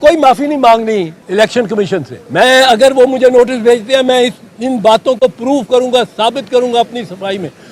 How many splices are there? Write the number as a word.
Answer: two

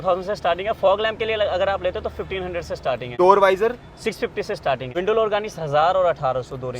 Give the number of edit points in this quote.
two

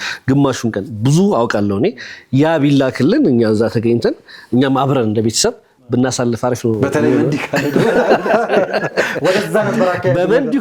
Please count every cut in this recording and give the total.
zero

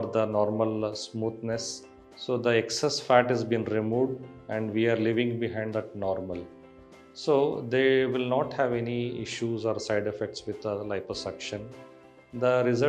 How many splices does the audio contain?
zero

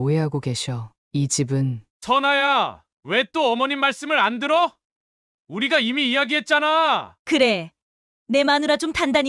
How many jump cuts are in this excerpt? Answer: two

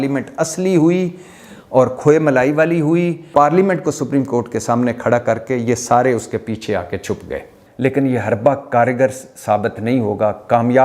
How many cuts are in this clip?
two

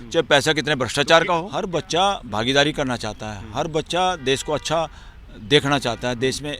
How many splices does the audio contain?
one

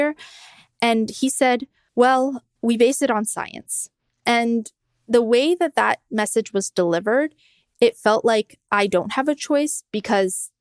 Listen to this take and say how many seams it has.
two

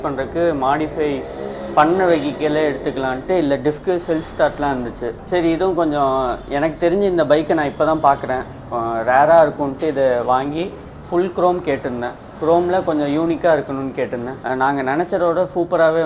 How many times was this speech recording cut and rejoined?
two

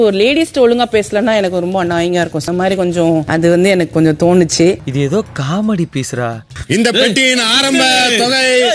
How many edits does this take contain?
one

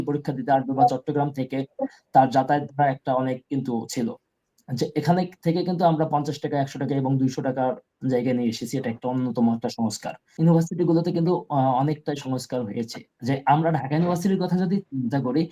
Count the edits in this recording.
one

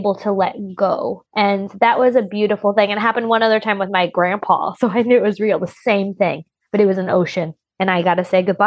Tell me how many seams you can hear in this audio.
one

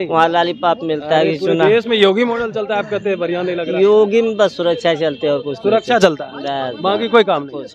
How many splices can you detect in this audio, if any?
zero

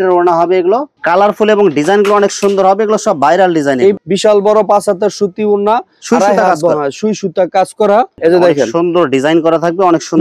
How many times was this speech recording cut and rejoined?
three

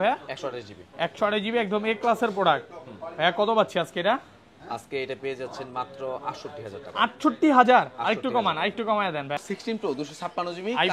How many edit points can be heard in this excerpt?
one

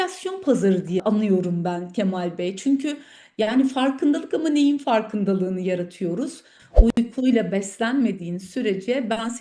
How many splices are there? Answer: two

